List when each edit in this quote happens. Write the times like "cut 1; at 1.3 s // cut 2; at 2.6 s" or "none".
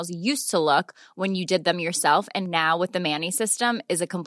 none